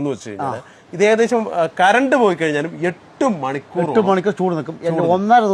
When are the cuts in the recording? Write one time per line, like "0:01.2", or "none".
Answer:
none

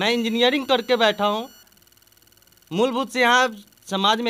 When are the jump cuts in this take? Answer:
none

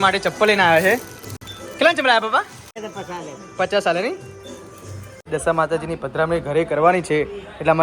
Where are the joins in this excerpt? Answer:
0:02.8
0:05.3

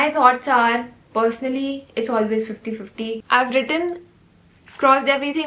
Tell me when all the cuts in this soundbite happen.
0:03.2

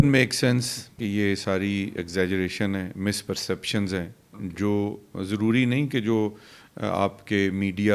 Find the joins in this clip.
0:01.0

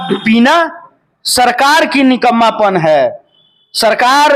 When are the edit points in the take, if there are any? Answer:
none

